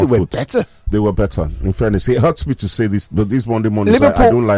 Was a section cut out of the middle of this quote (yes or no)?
no